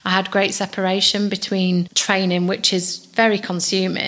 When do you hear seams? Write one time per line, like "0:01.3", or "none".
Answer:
0:01.9